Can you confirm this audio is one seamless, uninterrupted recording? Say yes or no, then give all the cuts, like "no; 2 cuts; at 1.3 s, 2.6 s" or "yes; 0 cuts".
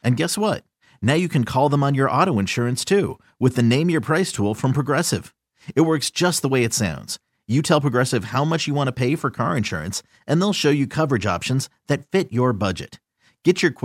yes; 0 cuts